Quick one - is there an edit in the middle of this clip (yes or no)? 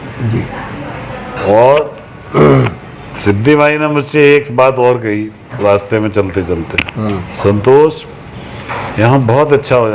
no